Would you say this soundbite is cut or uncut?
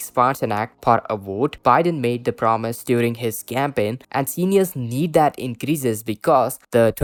uncut